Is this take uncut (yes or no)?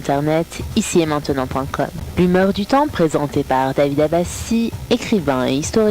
no